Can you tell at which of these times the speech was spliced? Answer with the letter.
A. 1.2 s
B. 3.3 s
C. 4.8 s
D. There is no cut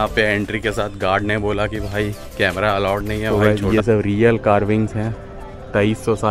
B